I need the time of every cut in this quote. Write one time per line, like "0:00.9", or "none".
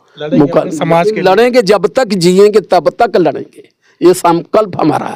none